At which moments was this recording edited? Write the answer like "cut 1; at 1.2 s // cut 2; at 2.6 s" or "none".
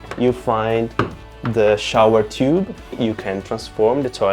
cut 1; at 2.9 s